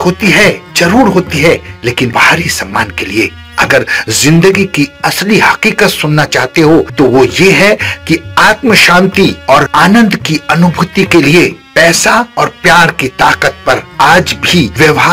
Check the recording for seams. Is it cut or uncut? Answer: cut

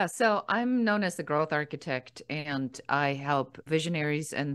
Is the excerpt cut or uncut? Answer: cut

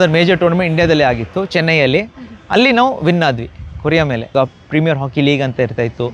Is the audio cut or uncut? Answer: cut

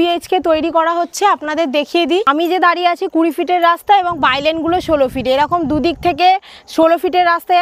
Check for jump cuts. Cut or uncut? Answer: cut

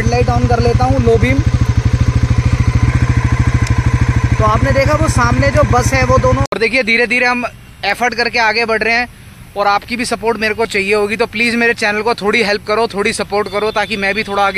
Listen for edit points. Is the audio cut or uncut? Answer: cut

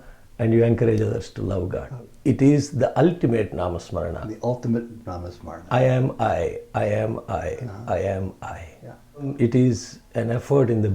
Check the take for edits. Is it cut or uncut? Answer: cut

